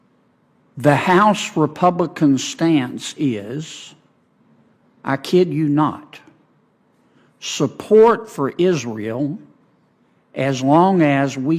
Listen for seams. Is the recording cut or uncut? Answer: uncut